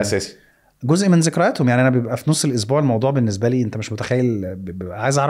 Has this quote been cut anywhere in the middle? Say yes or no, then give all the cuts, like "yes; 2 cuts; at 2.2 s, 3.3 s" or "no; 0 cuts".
no; 0 cuts